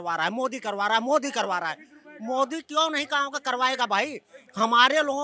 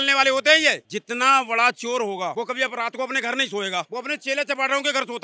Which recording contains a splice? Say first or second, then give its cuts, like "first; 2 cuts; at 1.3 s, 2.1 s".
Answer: second; 3 cuts; at 0.8 s, 2.3 s, 3.9 s